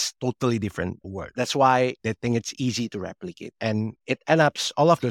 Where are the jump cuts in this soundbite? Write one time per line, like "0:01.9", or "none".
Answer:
0:01.3
0:02.0
0:04.0